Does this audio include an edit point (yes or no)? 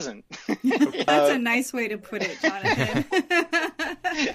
yes